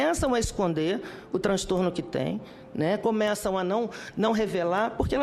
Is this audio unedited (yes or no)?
yes